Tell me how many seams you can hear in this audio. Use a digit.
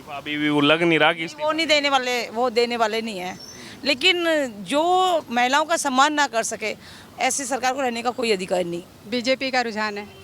1